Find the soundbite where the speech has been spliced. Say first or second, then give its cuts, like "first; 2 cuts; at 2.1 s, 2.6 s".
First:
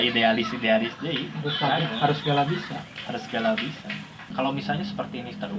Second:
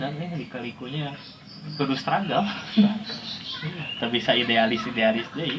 first; 1 cut; at 4.2 s